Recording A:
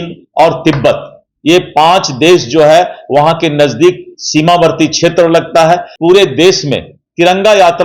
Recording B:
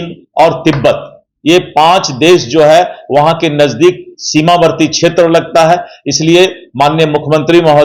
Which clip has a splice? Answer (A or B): A